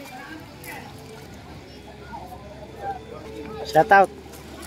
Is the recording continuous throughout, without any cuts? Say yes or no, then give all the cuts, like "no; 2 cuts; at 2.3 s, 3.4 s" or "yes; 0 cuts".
no; 2 cuts; at 1.2 s, 3.3 s